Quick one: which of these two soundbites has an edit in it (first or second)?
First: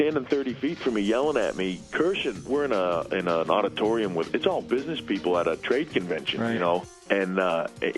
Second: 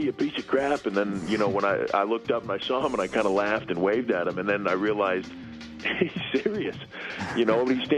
first